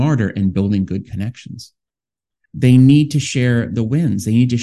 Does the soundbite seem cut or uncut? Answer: cut